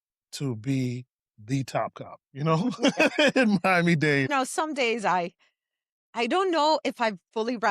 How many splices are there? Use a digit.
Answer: 1